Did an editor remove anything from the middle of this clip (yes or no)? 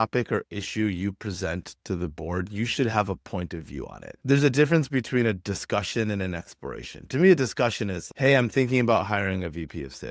no